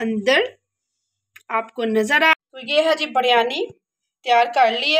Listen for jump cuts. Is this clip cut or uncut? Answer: cut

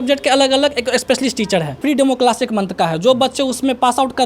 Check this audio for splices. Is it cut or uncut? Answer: cut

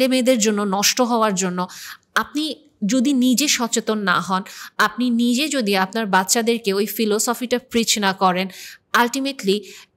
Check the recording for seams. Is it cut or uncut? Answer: uncut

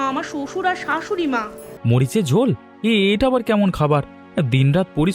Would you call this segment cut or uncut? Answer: cut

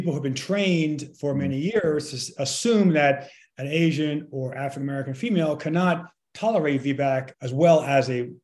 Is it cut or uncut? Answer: uncut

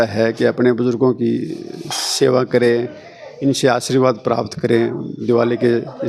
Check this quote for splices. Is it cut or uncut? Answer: uncut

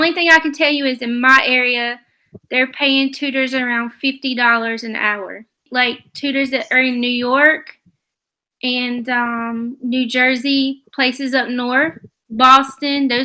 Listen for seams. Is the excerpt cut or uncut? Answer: cut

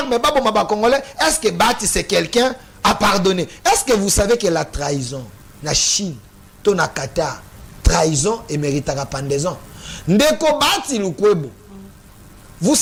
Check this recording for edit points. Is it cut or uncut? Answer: uncut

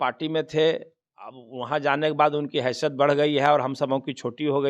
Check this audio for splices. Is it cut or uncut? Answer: uncut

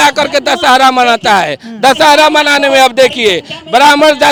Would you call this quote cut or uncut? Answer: uncut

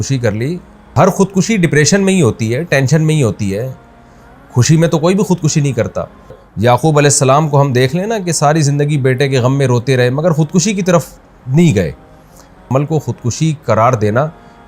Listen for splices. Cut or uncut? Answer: cut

